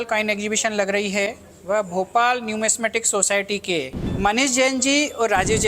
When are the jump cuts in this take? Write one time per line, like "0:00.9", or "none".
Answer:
none